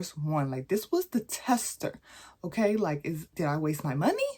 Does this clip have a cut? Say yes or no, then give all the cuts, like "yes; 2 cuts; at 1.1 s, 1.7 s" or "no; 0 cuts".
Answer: no; 0 cuts